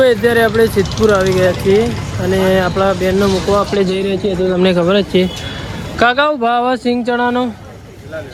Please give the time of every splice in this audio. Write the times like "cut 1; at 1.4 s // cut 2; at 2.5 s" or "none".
none

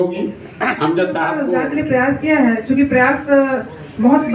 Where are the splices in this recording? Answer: cut 1; at 1.5 s

